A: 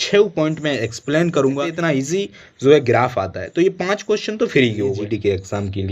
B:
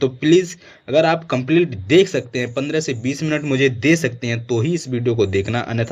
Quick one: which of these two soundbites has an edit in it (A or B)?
A